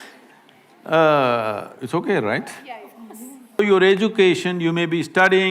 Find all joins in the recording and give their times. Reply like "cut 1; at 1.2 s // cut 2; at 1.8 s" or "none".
cut 1; at 3.6 s